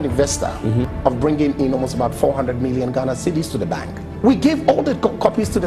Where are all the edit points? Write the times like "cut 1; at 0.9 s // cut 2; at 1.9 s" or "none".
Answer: cut 1; at 0.9 s // cut 2; at 4.0 s